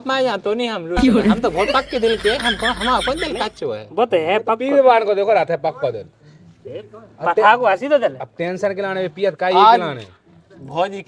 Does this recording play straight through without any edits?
yes; 0 cuts

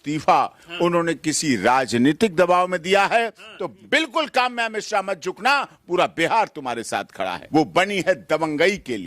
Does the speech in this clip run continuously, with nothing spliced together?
no; 2 cuts; at 3.7 s, 7.4 s

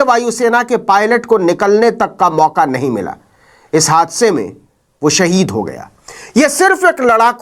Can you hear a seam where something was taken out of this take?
no; 0 cuts

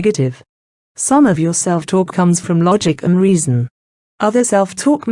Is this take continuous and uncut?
no; 1 cut; at 2.1 s

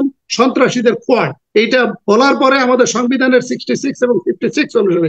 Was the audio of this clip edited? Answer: yes; 1 cut; at 1.4 s

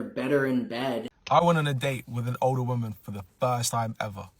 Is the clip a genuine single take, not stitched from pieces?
no; 1 cut; at 1.1 s

